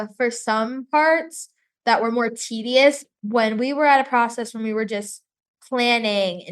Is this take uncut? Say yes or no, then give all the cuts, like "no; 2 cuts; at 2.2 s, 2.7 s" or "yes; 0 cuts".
no; 1 cut; at 3.0 s